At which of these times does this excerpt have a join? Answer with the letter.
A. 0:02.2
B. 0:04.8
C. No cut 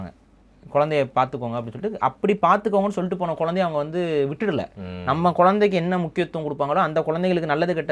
C